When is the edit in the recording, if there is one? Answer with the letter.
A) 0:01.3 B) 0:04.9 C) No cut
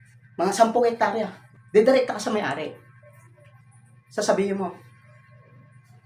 A